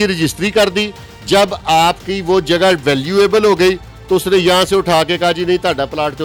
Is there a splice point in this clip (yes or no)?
no